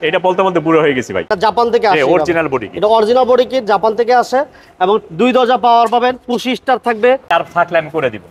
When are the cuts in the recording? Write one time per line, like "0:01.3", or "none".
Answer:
0:01.3
0:07.2